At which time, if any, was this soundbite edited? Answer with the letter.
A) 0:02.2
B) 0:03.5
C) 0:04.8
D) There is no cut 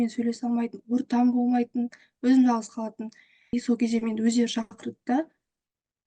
B